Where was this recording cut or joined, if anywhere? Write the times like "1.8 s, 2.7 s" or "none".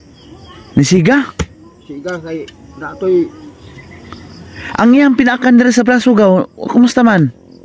none

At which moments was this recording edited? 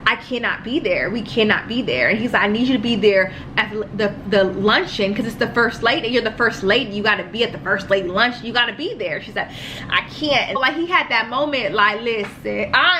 10.6 s

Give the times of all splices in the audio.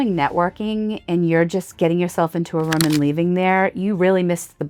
none

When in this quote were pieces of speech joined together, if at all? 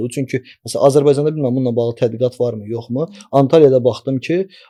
none

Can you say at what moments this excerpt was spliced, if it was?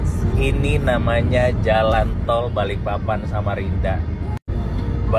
none

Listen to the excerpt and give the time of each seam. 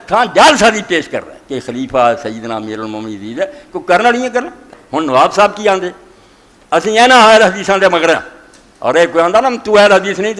4.6 s

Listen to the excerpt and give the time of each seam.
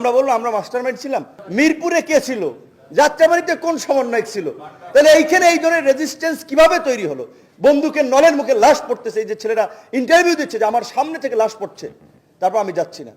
1.4 s

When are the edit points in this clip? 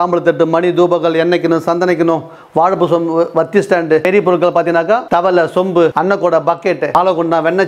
4.0 s, 5.0 s, 5.9 s, 6.9 s

